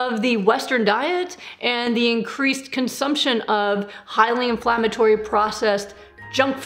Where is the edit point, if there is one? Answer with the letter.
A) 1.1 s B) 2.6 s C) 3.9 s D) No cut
D